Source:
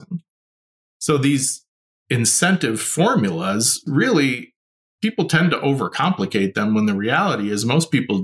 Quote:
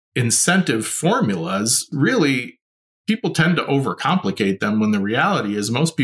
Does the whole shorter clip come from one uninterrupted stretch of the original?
yes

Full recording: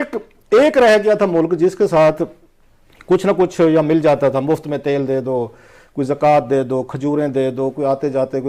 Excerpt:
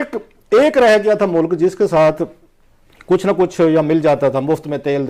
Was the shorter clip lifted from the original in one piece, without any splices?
yes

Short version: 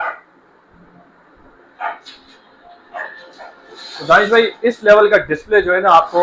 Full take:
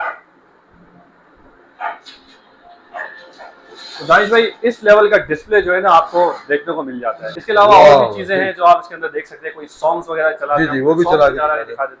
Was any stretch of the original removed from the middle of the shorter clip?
no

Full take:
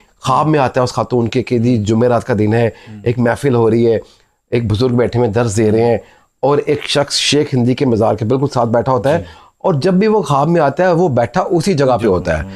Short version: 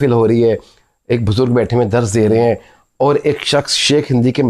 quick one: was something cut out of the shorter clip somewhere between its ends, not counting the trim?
no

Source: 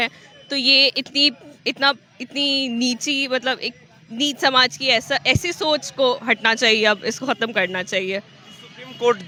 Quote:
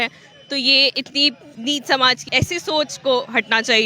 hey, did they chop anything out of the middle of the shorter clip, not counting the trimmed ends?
yes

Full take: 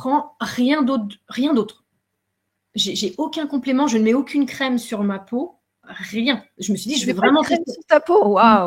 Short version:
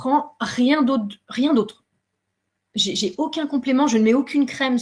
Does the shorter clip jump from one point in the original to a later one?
no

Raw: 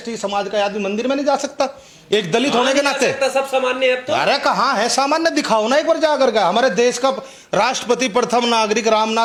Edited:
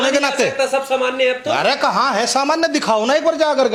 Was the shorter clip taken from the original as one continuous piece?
yes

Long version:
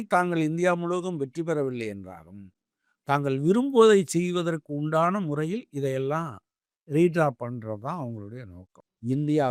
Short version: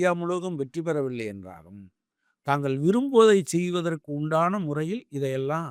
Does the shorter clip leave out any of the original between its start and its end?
no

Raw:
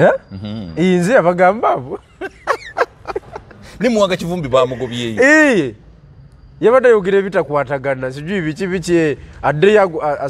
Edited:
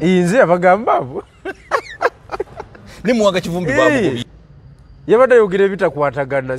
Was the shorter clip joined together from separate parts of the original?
yes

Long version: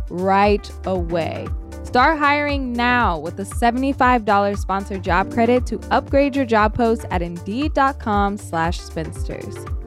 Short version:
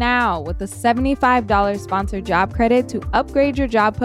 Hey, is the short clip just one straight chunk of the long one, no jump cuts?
yes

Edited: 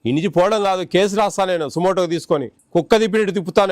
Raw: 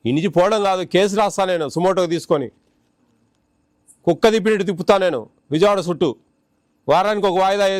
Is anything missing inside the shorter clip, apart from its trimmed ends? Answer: yes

